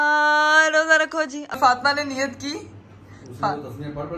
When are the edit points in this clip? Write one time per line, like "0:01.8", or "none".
0:01.6